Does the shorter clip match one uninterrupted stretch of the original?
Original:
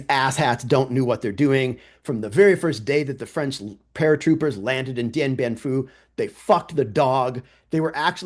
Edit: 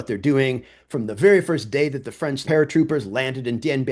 no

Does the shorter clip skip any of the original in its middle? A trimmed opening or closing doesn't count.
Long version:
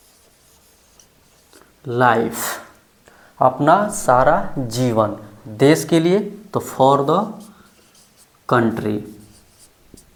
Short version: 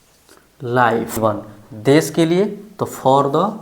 yes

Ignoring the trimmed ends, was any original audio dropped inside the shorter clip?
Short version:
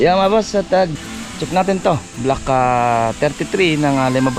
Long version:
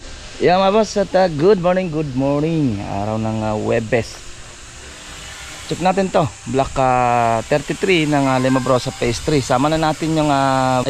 yes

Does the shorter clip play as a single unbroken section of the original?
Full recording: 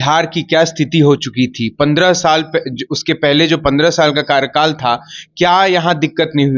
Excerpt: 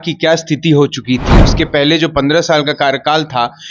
no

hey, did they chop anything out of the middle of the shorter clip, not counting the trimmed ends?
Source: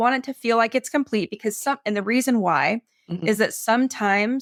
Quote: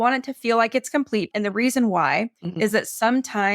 yes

